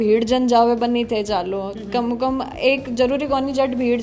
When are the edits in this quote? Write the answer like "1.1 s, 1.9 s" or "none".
none